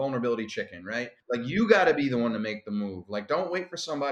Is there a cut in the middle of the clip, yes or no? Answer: yes